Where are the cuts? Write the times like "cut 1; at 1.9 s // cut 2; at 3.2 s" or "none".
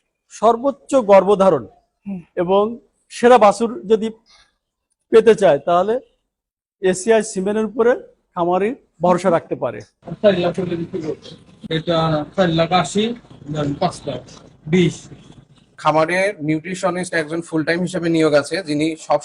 cut 1; at 10.1 s // cut 2; at 13.3 s // cut 3; at 15.8 s